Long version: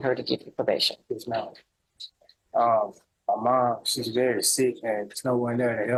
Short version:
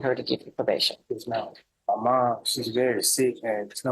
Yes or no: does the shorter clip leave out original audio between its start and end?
yes